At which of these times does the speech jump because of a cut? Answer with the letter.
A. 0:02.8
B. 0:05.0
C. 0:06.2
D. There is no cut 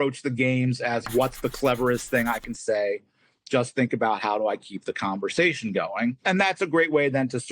C